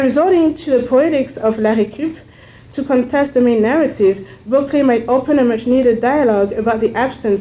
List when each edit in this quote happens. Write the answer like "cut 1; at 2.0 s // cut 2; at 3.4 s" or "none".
cut 1; at 1.3 s